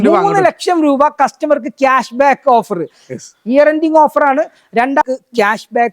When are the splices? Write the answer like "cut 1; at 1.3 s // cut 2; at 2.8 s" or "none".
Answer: cut 1; at 5.0 s